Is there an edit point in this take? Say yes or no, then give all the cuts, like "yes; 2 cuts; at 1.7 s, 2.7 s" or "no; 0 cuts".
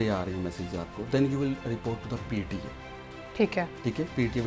no; 0 cuts